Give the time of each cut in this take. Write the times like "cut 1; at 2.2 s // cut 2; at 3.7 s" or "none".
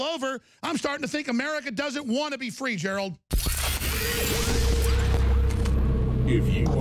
cut 1; at 3.3 s